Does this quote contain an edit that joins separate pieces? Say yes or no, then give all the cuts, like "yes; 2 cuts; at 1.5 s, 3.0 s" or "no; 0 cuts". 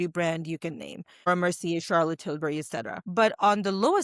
yes; 2 cuts; at 1.3 s, 3.0 s